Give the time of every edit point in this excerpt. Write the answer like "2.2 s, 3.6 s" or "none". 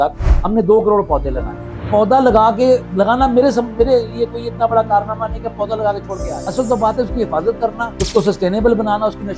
1.9 s, 2.9 s, 6.3 s, 7.9 s